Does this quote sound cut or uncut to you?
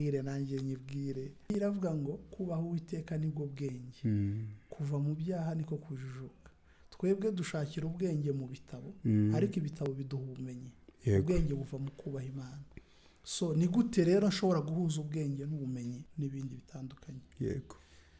cut